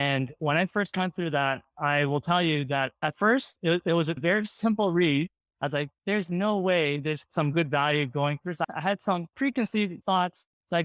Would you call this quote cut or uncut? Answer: cut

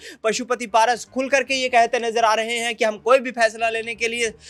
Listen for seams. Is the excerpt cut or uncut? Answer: uncut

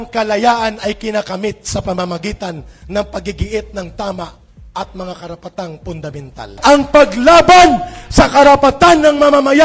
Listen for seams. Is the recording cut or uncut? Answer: cut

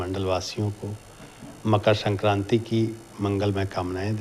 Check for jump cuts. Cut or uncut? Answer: uncut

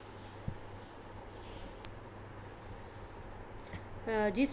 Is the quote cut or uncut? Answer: cut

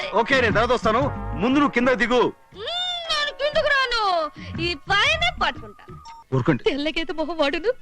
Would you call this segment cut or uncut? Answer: cut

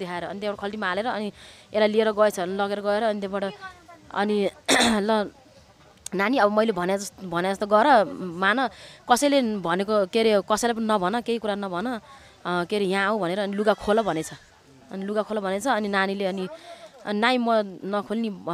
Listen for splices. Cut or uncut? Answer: uncut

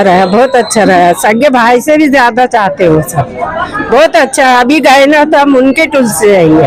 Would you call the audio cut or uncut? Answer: uncut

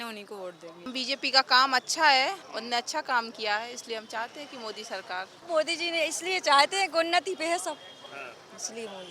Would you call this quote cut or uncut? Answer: cut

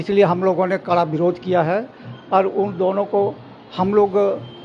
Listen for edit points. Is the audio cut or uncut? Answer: uncut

